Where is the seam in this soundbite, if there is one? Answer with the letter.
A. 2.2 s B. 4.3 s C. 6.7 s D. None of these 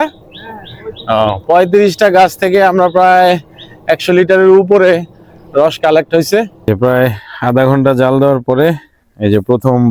C